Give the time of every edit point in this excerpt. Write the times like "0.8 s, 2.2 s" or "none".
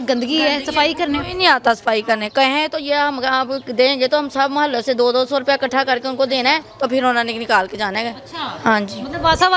none